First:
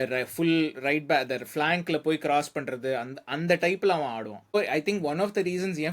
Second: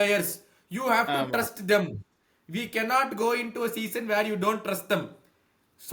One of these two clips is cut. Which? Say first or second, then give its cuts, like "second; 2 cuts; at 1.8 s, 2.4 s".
first; 1 cut; at 4.5 s